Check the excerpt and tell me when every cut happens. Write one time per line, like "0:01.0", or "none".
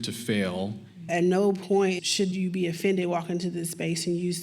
0:01.1